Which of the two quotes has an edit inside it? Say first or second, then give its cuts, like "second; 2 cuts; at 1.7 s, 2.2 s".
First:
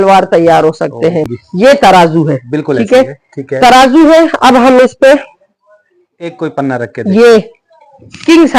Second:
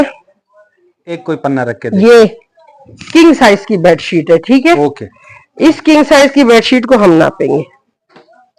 first; 1 cut; at 1.4 s